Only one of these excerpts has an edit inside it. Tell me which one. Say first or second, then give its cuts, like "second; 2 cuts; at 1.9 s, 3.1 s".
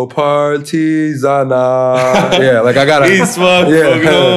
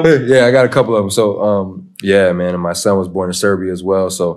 second; 1 cut; at 1.9 s